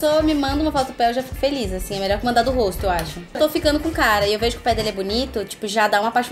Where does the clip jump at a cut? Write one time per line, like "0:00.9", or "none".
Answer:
0:03.4